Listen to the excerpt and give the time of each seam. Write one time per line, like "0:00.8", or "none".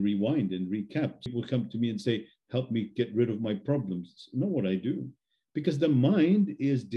0:01.3